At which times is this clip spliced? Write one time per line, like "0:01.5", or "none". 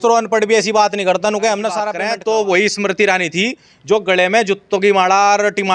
0:01.9